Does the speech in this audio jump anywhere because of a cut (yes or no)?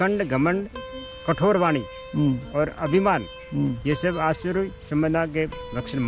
no